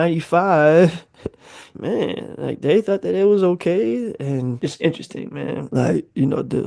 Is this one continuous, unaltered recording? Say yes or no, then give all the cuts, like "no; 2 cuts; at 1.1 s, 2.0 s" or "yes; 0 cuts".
no; 3 cuts; at 1.6 s, 4.4 s, 5.7 s